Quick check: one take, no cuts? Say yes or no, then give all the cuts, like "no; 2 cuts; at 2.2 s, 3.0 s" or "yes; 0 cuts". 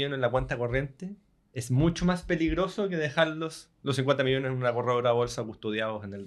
yes; 0 cuts